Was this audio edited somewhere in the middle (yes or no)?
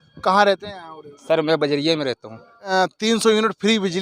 yes